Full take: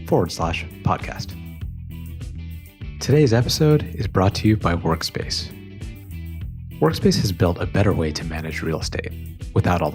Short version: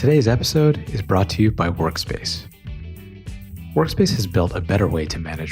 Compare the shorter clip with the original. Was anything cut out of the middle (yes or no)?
no